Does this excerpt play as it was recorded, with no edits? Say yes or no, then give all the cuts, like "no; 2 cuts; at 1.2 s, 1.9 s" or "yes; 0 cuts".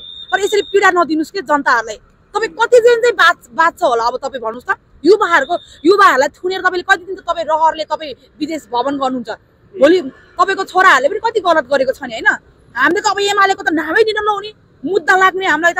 yes; 0 cuts